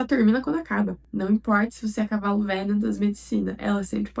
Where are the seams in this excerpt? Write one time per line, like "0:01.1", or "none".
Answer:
0:01.0